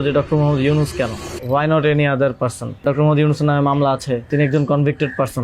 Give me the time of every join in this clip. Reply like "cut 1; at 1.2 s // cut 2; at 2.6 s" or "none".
cut 1; at 1.3 s // cut 2; at 2.8 s // cut 3; at 4.3 s